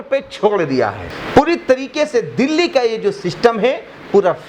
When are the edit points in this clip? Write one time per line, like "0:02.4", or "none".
0:01.1